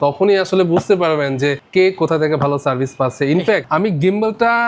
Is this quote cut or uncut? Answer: cut